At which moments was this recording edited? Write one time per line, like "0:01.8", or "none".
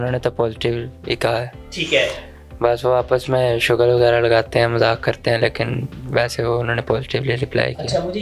none